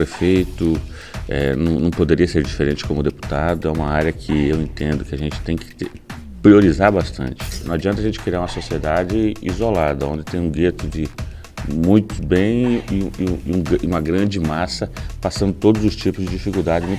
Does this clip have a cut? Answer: yes; 1 cut; at 7.6 s

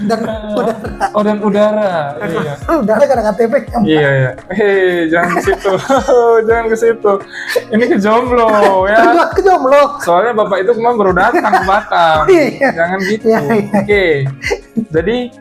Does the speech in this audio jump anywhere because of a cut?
no; 0 cuts

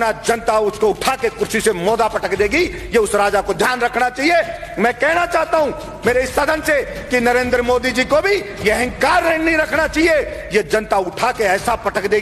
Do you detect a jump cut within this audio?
no; 0 cuts

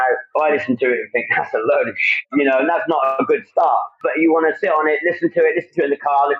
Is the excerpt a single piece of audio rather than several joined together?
no; 1 cut; at 2.2 s

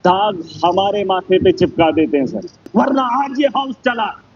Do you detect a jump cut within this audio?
yes; 1 cut; at 2.6 s

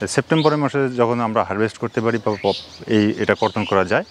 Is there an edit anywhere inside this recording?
no; 0 cuts

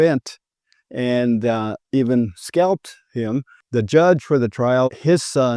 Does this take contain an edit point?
yes; 2 cuts; at 3.6 s, 4.9 s

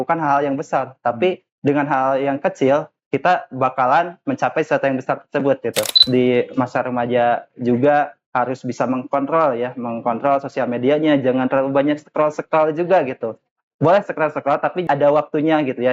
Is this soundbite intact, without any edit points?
no; 2 cuts; at 6.0 s, 14.9 s

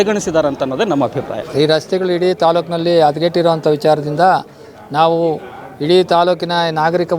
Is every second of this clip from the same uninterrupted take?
no; 1 cut; at 1.4 s

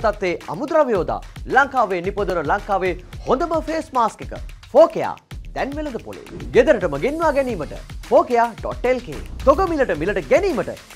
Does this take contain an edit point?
no; 0 cuts

